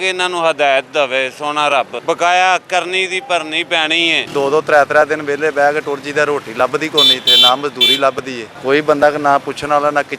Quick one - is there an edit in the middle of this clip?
yes; 3 cuts; at 2.0 s, 4.2 s, 8.4 s

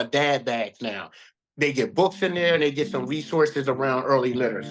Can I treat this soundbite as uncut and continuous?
yes; 0 cuts

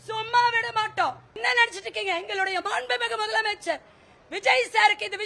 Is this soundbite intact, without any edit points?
no; 1 cut; at 1.4 s

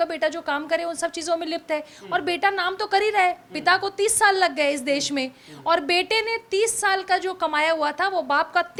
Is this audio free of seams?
yes; 0 cuts

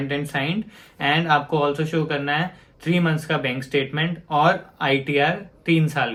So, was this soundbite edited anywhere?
no; 0 cuts

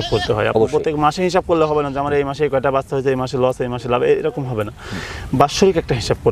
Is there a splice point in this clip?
no; 0 cuts

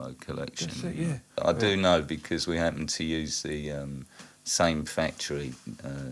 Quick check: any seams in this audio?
yes; 1 cut; at 1.3 s

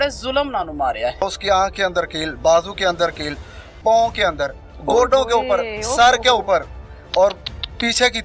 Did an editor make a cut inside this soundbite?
yes; 1 cut; at 1.2 s

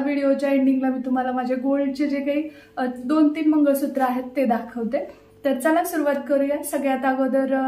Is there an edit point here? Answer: no; 0 cuts

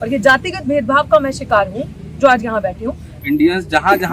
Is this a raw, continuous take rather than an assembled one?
no; 1 cut; at 3.1 s

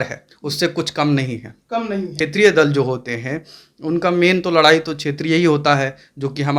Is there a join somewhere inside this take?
yes; 1 cut; at 2.1 s

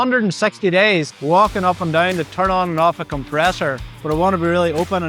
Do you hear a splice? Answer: yes; 2 cuts; at 1.1 s, 3.9 s

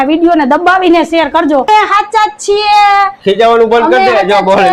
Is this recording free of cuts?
no; 1 cut; at 1.7 s

